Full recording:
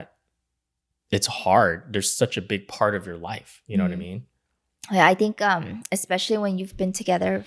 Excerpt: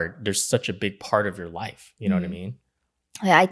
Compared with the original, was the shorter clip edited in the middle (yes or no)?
no